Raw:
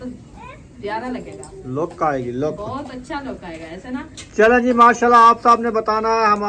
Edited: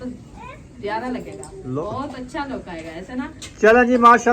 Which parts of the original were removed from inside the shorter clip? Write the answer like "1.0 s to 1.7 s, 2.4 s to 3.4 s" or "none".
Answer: 1.8 s to 2.6 s